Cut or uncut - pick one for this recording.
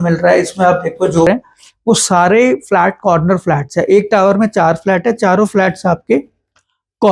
cut